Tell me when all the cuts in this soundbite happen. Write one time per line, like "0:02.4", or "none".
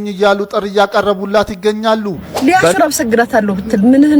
0:02.2